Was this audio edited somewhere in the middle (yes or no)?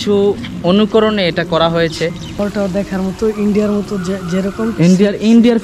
yes